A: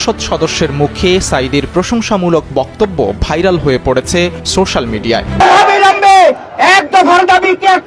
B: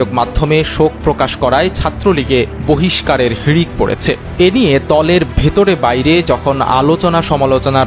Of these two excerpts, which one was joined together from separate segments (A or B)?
A